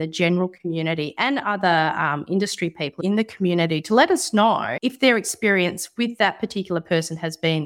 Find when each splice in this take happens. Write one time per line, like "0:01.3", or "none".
0:04.7